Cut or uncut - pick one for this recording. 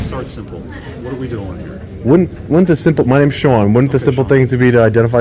uncut